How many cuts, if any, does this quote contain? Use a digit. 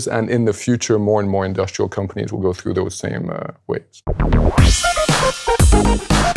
1